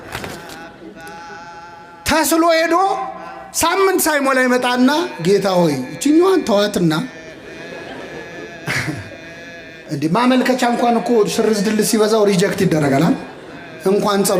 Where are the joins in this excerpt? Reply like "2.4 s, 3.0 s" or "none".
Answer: none